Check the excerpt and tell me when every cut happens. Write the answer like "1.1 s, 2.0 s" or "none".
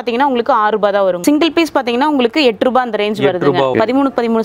1.2 s, 3.7 s